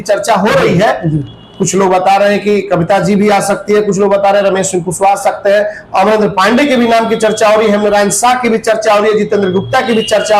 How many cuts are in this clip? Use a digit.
0